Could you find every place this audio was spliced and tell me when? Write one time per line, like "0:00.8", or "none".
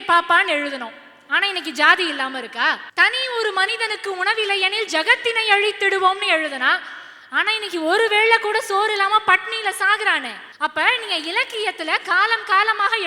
0:02.8
0:10.4